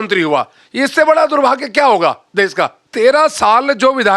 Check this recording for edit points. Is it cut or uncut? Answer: cut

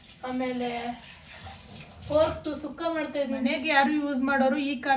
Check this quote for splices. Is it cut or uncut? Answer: cut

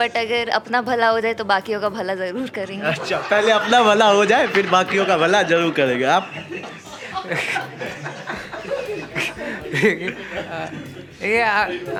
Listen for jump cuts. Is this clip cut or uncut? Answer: uncut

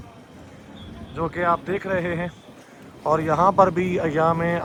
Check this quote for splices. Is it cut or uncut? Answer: uncut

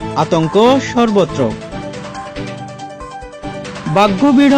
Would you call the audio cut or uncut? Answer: uncut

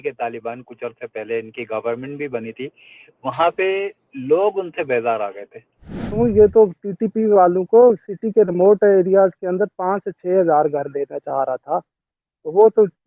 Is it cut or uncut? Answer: cut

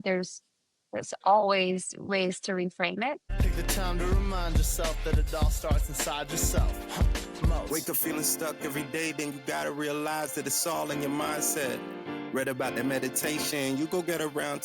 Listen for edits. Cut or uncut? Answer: cut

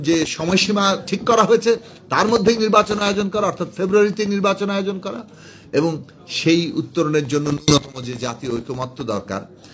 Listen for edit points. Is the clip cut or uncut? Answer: uncut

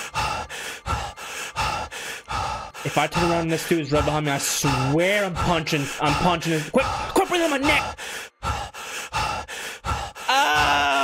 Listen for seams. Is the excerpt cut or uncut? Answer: uncut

